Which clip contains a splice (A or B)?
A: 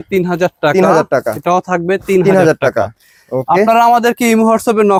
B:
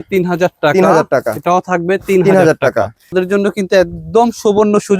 B